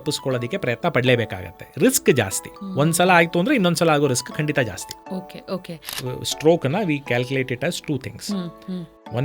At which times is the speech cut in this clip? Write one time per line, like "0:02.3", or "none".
0:05.8